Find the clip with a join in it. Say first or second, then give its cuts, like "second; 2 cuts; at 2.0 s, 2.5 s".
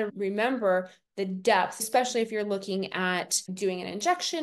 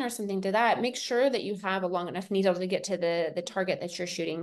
first; 2 cuts; at 1.9 s, 3.4 s